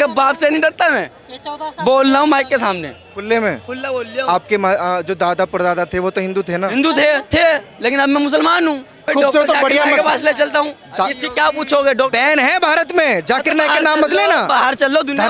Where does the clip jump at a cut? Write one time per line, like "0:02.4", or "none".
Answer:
0:09.1